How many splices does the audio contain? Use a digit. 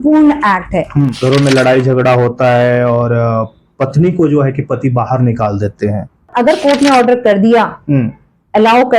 2